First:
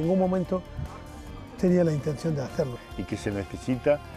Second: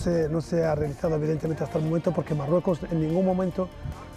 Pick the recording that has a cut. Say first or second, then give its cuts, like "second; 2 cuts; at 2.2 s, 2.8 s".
first; 1 cut; at 2.8 s